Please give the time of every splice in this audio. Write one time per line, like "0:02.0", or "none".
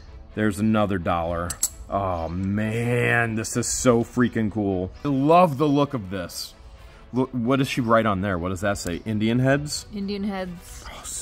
0:05.1